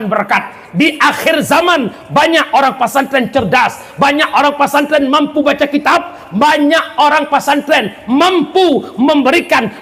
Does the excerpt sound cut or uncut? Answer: uncut